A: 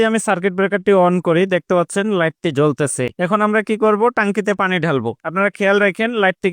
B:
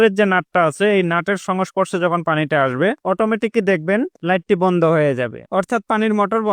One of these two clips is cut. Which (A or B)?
A